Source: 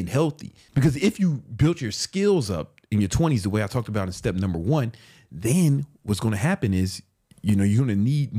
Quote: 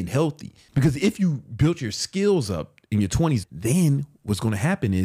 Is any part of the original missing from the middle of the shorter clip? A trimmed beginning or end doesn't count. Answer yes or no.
yes